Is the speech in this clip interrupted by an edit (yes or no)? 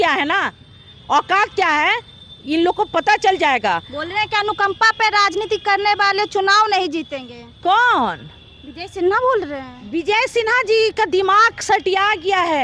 no